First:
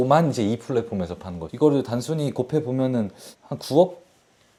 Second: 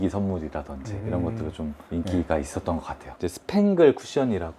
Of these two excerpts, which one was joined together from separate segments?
second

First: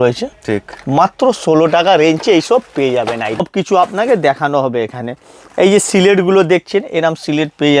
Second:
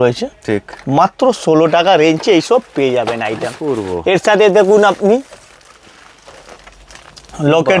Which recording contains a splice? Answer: first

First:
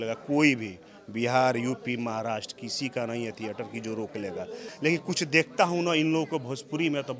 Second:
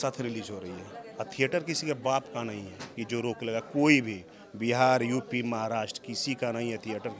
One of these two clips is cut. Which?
first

